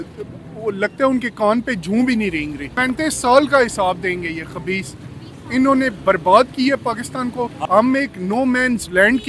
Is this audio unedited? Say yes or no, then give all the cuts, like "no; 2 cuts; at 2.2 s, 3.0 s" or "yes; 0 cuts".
no; 2 cuts; at 2.8 s, 7.6 s